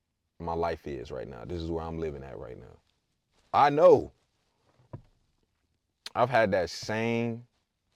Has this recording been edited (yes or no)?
no